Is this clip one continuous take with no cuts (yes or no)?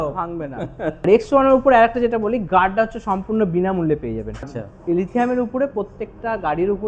no